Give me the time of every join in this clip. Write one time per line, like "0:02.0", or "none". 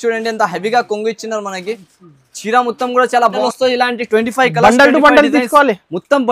0:03.4